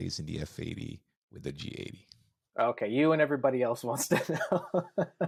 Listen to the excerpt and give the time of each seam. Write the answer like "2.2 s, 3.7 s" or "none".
none

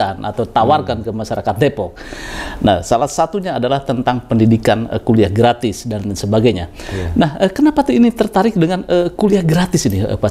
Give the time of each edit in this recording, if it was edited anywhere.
none

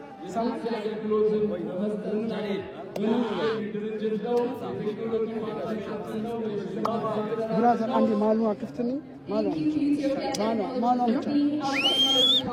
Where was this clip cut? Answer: none

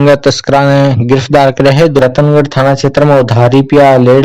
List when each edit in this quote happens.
2.0 s

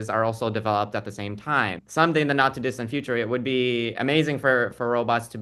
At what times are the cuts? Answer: 1.8 s

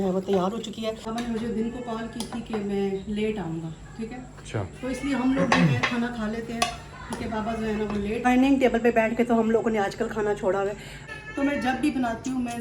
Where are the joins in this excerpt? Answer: 1.0 s, 8.2 s, 11.0 s

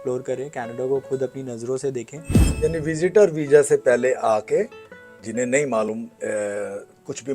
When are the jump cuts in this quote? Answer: 2.4 s

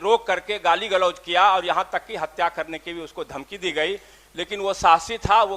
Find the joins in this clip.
none

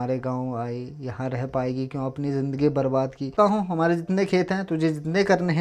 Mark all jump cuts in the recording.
3.3 s

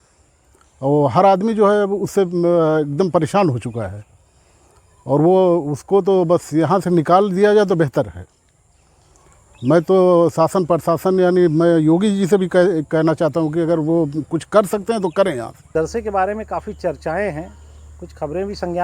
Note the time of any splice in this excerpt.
15.7 s

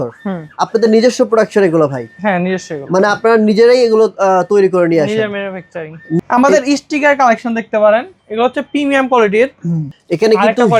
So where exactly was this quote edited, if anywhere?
6.2 s, 9.9 s

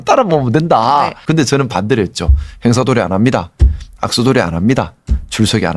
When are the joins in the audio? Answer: 1.2 s

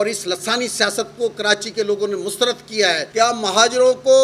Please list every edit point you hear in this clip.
3.1 s

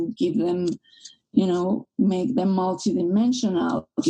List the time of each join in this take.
none

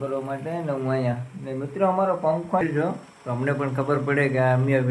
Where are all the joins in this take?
2.6 s

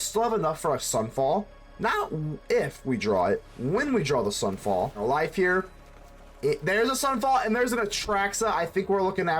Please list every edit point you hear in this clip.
5.0 s

